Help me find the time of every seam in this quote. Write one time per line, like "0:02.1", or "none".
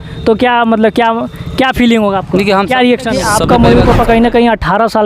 0:03.3